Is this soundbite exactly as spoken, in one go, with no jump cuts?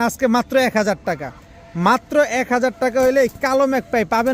yes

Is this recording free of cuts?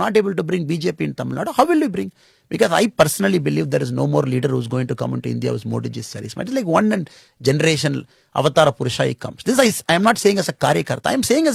yes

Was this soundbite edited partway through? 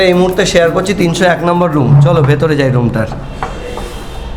no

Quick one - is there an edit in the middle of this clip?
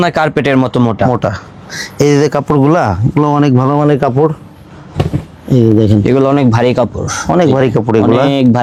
no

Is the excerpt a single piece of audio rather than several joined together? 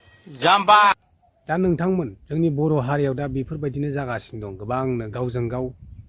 no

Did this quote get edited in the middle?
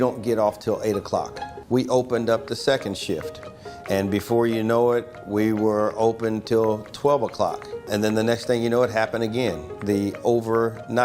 yes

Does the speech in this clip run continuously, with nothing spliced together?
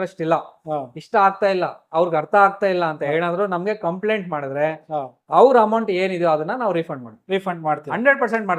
yes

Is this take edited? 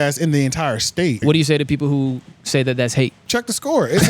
yes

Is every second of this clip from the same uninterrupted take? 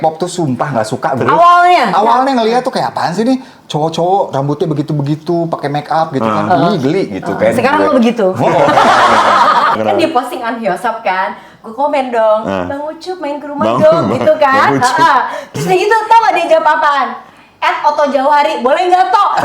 no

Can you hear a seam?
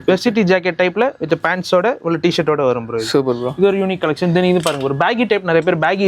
no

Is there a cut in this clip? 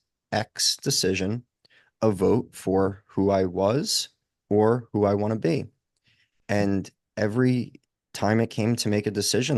no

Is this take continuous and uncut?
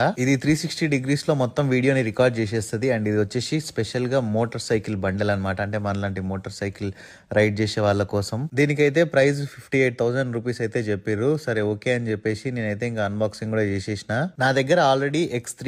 yes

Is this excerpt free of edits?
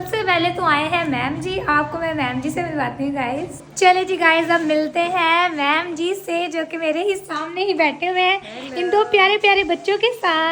yes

